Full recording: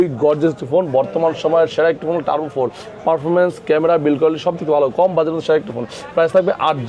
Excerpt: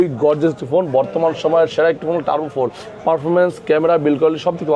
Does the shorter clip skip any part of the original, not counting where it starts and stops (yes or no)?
no